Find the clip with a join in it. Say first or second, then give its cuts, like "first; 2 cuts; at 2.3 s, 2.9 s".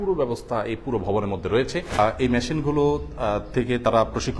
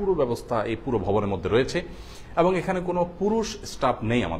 first; 1 cut; at 1.9 s